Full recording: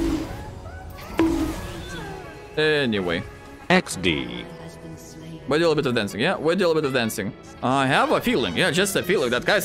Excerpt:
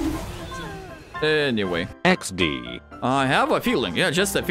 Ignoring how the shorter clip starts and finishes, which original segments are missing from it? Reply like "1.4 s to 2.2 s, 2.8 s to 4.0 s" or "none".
3.3 s to 3.6 s, 4.5 s to 7.4 s